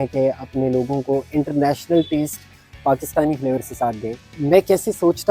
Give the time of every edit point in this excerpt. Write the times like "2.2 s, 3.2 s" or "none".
none